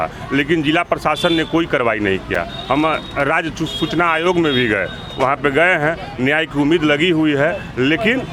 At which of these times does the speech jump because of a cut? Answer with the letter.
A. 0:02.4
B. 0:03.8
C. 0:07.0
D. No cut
D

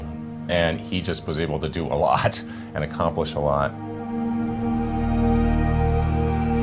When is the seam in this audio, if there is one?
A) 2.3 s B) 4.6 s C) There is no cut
A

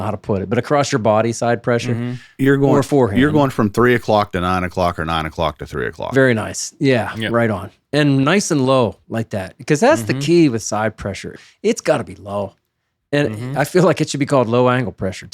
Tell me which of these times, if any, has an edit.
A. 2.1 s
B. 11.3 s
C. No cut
B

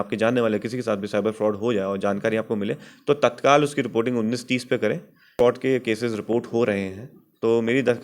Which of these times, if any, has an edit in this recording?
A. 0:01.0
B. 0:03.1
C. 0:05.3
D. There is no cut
C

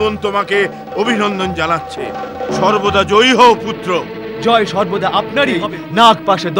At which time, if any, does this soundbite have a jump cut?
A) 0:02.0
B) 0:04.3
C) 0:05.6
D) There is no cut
C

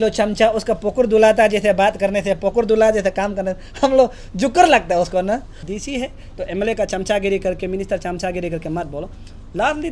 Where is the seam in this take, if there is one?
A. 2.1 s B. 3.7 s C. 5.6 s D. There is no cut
C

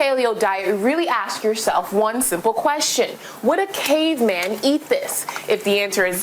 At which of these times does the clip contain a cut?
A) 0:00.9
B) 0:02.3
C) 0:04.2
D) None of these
D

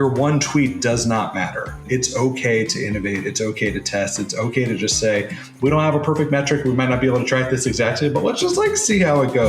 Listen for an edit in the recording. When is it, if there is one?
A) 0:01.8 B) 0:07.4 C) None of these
A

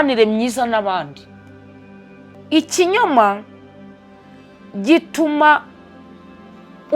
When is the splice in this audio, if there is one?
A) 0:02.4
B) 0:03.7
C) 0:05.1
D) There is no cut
A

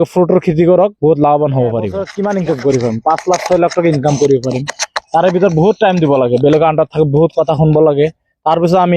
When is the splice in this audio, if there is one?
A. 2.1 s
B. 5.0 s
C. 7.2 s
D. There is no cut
A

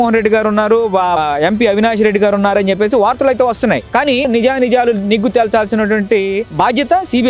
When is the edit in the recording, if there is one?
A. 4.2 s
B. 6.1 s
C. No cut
A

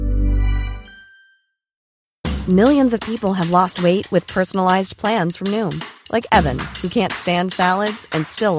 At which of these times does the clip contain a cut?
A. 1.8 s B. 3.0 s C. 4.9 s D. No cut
A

